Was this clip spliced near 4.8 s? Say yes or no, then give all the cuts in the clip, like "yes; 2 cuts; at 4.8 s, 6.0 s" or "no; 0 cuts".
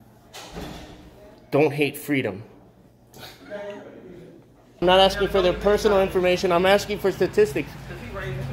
yes; 1 cut; at 4.8 s